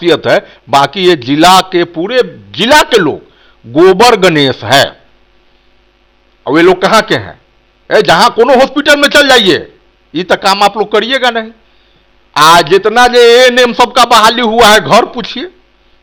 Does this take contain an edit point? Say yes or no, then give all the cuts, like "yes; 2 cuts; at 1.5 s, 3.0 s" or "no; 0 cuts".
no; 0 cuts